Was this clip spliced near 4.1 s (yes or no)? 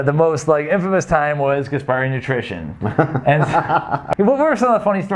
yes